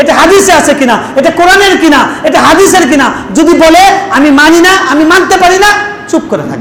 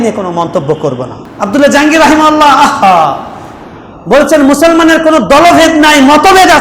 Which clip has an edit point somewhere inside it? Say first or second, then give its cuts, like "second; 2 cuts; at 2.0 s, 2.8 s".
second; 1 cut; at 1.2 s